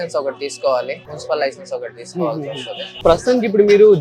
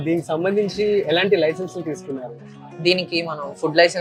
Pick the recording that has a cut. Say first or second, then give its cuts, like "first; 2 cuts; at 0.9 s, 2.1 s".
first; 2 cuts; at 1.0 s, 3.0 s